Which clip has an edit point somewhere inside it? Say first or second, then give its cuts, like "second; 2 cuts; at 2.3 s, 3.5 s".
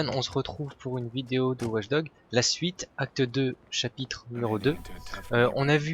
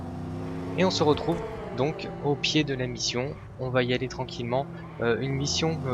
second; 1 cut; at 2.0 s